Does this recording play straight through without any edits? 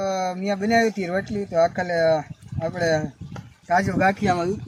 yes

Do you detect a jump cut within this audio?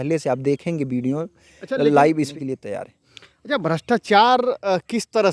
yes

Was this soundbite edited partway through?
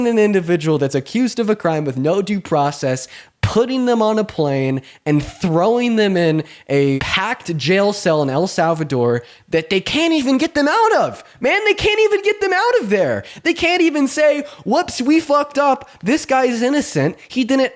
yes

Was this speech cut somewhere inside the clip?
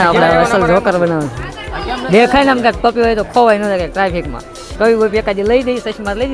no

